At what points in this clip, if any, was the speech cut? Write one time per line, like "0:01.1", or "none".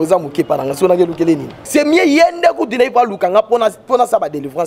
0:01.6